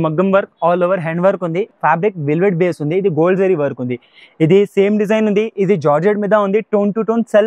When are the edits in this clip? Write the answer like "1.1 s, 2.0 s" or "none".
1.7 s